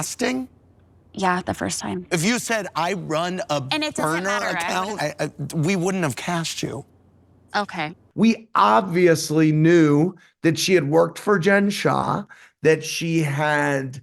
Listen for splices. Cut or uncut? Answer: uncut